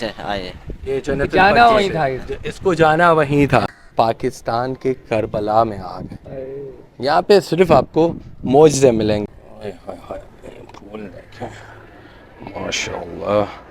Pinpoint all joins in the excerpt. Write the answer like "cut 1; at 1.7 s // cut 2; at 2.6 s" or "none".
cut 1; at 3.8 s // cut 2; at 9.2 s